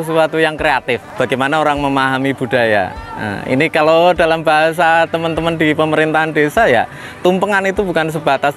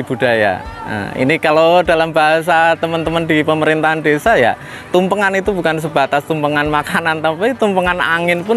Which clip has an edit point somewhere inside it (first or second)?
first